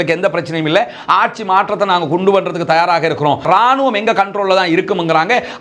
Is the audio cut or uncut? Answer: cut